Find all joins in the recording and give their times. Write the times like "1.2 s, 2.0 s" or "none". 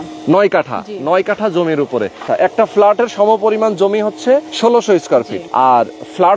2.3 s, 4.5 s, 5.4 s